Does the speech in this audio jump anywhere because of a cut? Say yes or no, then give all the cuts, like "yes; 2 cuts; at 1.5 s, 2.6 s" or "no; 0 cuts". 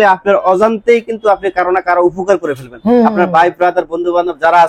no; 0 cuts